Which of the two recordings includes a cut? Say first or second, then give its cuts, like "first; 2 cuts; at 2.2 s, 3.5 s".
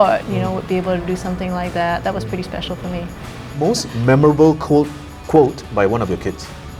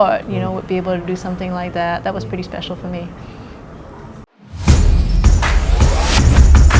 first; 1 cut; at 3.5 s